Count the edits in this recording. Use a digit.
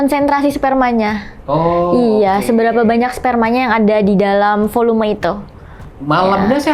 0